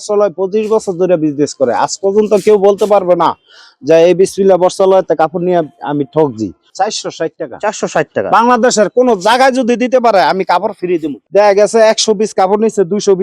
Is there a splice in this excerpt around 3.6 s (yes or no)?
no